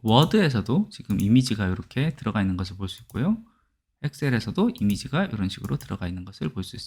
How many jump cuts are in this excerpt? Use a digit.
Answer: 0